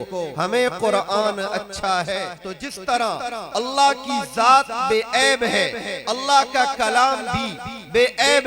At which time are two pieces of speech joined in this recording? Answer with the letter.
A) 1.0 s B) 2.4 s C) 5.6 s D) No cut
B